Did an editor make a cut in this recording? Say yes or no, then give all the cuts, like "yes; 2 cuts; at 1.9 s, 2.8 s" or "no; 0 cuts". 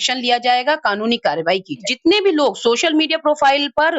yes; 1 cut; at 1.8 s